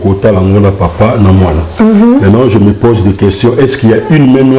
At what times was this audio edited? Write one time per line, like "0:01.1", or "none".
none